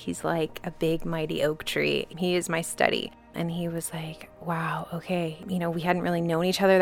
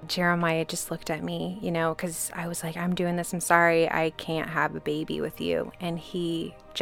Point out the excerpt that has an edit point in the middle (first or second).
first